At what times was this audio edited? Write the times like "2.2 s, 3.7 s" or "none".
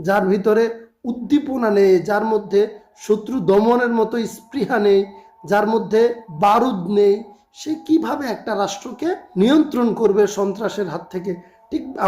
6.2 s, 9.2 s